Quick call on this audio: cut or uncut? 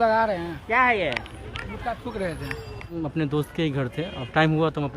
cut